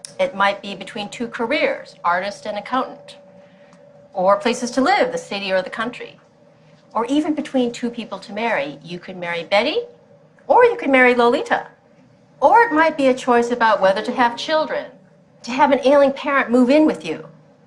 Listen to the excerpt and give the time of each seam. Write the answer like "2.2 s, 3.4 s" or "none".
none